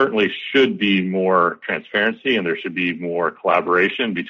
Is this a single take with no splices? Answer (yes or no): yes